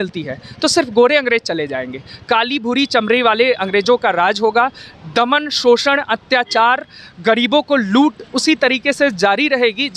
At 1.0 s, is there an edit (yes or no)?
no